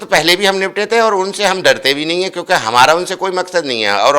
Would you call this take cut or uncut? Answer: uncut